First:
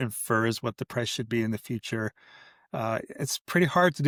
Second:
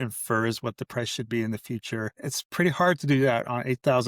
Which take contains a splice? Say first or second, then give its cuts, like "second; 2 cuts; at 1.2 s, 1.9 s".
second; 1 cut; at 2.2 s